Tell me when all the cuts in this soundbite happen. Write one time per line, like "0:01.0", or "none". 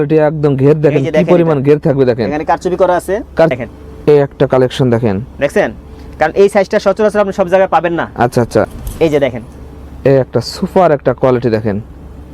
0:03.5
0:08.8